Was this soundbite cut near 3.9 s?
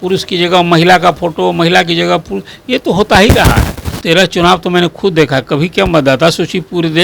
yes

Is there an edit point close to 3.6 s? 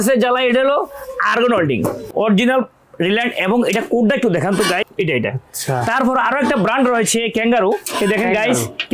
no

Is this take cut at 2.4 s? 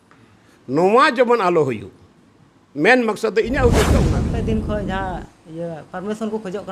no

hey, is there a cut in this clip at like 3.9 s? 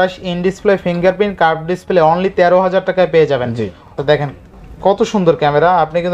yes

